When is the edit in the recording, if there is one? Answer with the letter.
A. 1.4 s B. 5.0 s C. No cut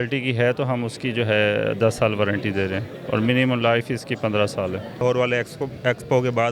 B